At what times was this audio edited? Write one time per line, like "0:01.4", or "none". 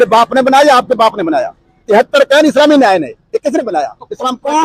none